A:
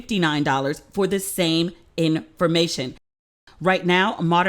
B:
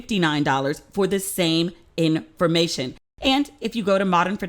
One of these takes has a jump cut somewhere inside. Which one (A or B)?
A